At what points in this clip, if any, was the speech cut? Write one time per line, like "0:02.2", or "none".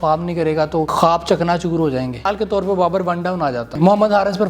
0:00.9
0:02.3
0:03.8

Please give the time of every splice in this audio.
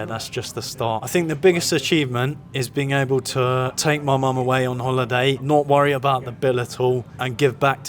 0:01.1
0:03.7
0:05.4

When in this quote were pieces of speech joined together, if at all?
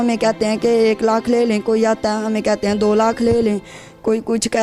none

